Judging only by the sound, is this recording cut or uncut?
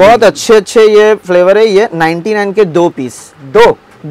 uncut